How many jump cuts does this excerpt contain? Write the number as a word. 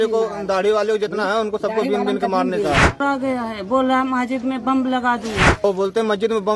two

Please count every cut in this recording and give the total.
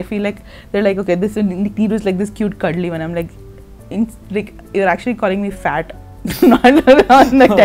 zero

